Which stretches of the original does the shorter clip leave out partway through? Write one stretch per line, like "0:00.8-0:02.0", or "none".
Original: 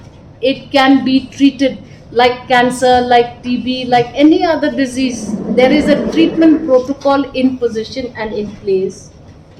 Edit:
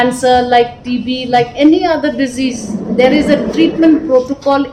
none